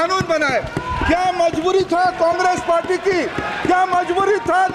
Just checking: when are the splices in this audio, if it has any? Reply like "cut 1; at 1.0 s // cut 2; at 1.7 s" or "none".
none